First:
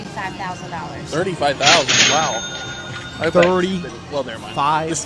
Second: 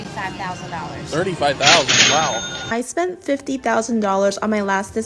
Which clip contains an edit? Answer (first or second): second